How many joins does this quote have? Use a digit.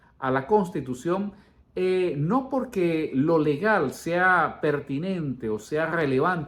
0